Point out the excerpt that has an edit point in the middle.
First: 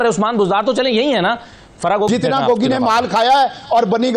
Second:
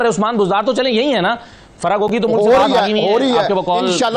first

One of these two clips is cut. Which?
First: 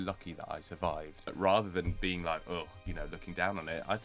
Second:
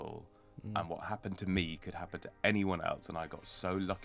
first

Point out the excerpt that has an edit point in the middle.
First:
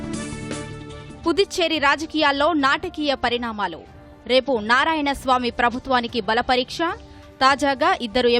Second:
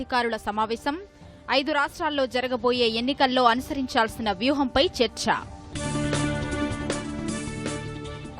first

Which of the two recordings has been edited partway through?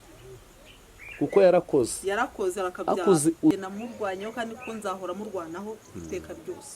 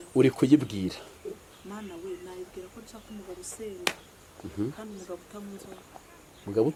first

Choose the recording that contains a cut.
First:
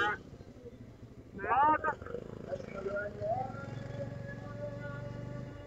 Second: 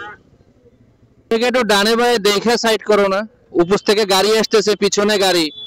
second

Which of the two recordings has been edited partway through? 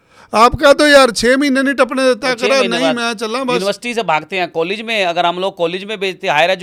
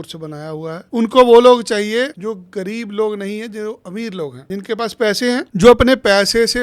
second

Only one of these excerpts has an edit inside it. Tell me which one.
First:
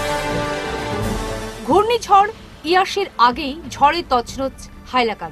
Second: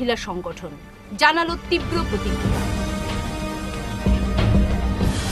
first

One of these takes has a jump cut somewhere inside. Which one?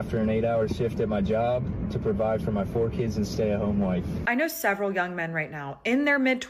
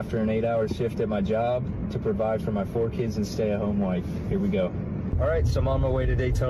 first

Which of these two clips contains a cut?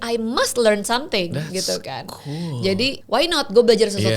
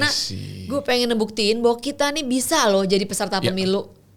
first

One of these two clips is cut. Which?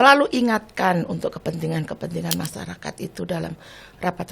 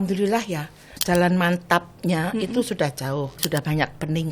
second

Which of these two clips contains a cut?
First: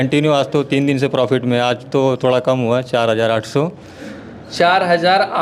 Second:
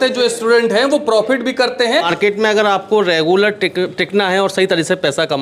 second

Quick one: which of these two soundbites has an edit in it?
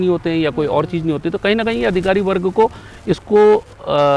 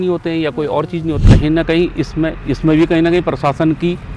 second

